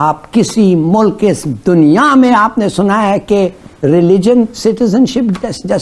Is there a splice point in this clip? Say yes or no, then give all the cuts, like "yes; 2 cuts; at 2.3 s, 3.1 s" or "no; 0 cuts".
no; 0 cuts